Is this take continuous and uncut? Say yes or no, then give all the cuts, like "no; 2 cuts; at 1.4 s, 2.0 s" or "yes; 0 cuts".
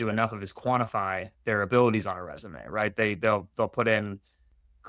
yes; 0 cuts